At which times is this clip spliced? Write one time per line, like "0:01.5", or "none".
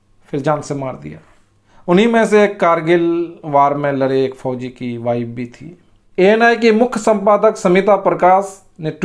0:01.9
0:06.1